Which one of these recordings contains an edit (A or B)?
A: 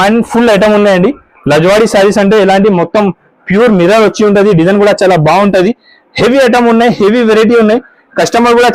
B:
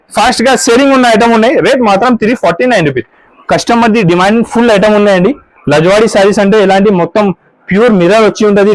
B